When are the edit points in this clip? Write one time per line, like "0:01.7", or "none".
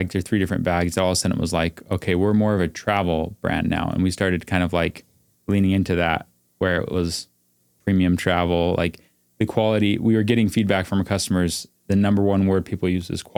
none